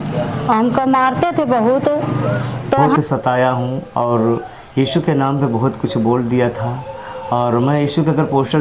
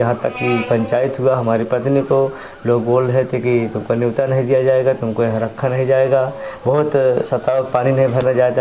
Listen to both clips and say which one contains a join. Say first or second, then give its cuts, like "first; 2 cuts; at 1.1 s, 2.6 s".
first; 1 cut; at 3.0 s